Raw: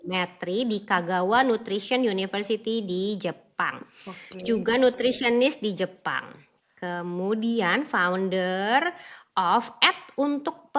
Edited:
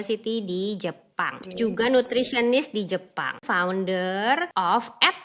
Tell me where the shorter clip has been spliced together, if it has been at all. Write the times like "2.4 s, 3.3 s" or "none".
1.4 s, 3.4 s, 4.5 s

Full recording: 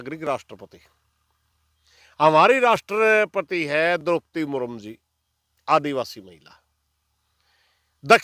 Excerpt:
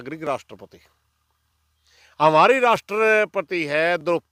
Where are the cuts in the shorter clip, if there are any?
none

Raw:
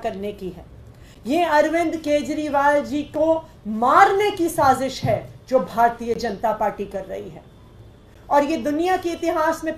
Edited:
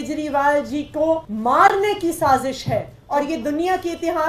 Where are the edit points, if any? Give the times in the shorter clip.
1.3 s, 3.0 s

